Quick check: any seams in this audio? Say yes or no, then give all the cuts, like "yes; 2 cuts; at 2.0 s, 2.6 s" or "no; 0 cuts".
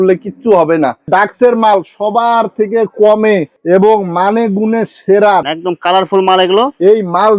yes; 2 cuts; at 1.1 s, 5.5 s